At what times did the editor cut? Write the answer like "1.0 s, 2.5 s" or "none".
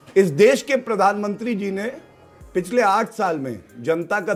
none